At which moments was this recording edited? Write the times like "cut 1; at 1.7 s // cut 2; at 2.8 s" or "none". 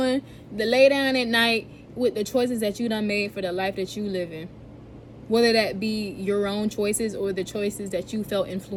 none